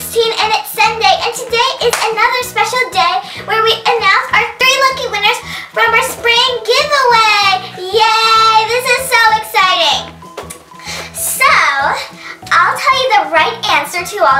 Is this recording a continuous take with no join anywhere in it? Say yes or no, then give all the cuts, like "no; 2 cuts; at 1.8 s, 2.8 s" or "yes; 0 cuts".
yes; 0 cuts